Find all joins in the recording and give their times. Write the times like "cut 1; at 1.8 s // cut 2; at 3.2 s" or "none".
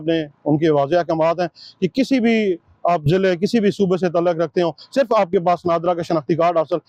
none

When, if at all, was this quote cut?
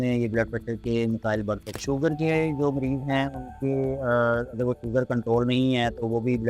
none

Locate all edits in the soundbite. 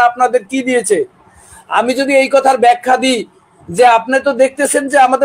none

